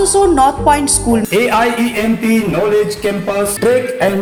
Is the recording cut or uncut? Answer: uncut